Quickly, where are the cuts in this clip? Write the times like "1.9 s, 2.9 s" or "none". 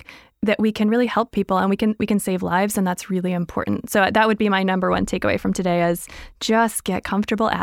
none